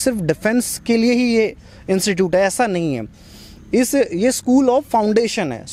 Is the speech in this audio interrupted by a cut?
no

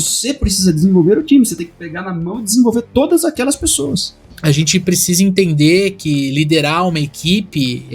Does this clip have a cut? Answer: yes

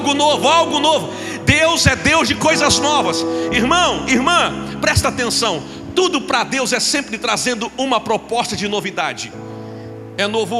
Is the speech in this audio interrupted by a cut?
no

